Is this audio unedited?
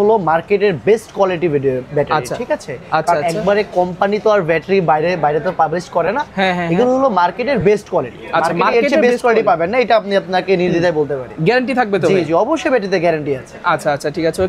yes; 0 cuts

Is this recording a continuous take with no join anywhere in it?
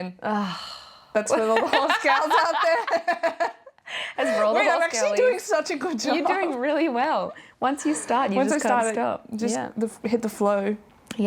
yes; 0 cuts

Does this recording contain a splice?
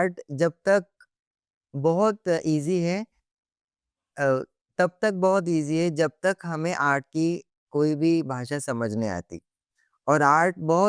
no; 0 cuts

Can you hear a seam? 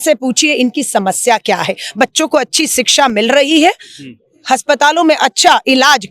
no; 0 cuts

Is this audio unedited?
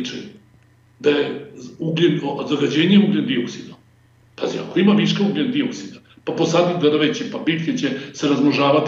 yes; 0 cuts

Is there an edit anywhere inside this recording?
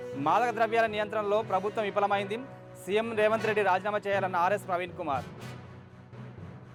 no; 0 cuts

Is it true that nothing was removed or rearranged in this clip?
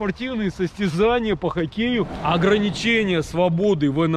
no; 1 cut; at 2.2 s

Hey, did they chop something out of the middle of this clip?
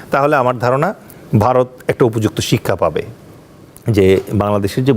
yes; 1 cut; at 3.1 s

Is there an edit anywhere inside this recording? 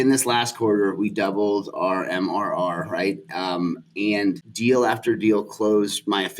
yes; 1 cut; at 4.5 s

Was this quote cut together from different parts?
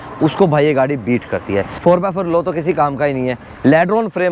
yes; 2 cuts; at 1.7 s, 3.5 s

